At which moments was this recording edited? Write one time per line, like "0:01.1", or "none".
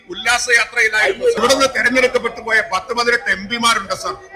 0:01.4

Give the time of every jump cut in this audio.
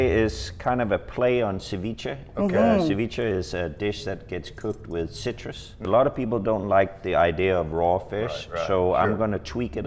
0:05.9

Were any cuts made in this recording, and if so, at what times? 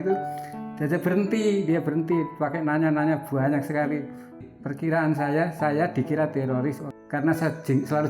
0:04.5
0:06.9

